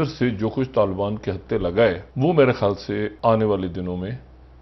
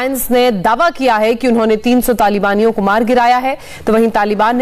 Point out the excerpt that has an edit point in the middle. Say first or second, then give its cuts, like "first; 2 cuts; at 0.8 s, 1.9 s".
first; 2 cuts; at 2.1 s, 3.1 s